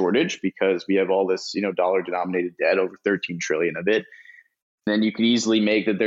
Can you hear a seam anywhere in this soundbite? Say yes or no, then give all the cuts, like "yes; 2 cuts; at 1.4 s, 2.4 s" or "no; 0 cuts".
yes; 1 cut; at 4.9 s